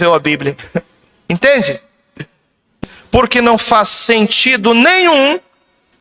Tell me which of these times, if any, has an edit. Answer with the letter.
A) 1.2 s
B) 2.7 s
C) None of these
B